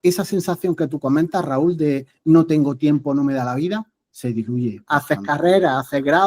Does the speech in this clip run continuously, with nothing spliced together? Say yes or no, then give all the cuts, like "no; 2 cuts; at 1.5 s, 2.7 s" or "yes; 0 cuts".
no; 1 cut; at 4.8 s